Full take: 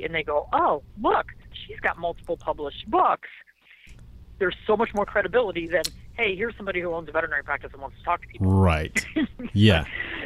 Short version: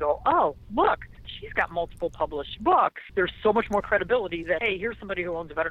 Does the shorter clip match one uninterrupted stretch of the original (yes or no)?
no